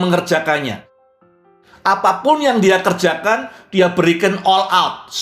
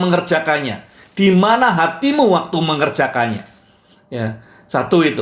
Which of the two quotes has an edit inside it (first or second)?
first